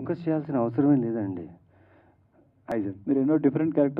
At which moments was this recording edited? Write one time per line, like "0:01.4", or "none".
0:02.7

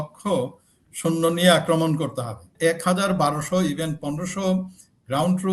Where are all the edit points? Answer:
0:02.5

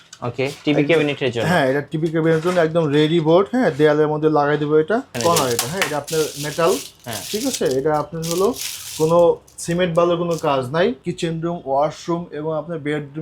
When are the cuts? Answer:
0:05.2
0:11.1

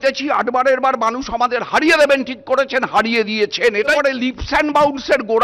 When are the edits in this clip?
0:04.0

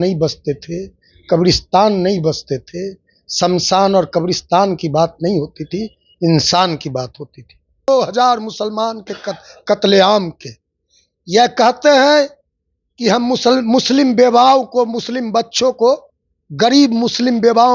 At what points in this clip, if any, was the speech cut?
0:07.9

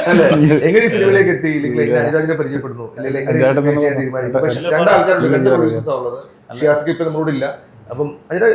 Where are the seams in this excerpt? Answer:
none

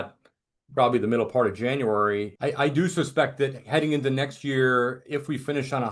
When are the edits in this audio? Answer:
0:02.3

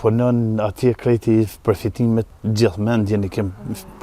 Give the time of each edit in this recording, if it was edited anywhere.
0:02.3

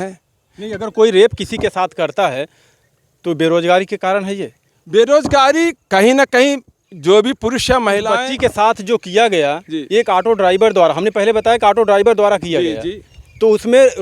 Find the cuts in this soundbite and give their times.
none

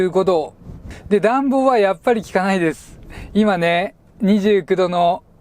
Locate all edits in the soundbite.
0:00.9

